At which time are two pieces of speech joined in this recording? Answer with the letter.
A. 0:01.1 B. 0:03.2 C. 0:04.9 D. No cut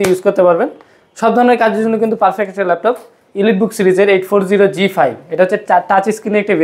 B